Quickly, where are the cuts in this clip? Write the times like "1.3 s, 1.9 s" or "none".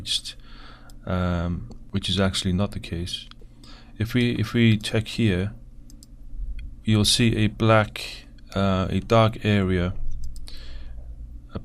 none